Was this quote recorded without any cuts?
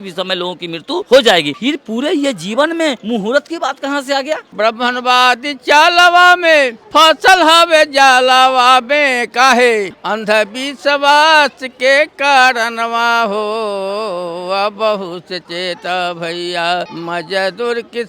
no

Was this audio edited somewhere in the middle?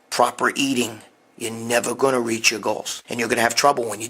yes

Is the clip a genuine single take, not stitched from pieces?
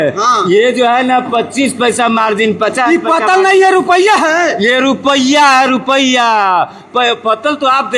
yes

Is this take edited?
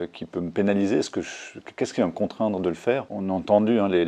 yes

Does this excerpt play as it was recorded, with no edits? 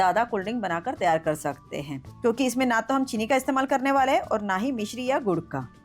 no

